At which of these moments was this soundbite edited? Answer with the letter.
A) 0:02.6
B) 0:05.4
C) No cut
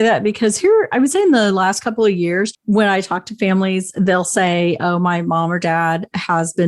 A